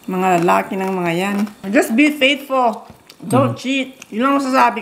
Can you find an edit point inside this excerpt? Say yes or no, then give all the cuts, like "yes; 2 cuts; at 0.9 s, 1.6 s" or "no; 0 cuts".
yes; 1 cut; at 1.6 s